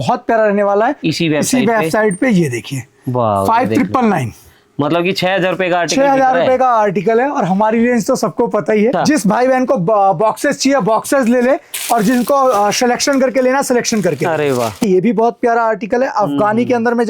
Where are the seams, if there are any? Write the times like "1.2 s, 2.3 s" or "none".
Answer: 1.0 s, 8.9 s, 14.8 s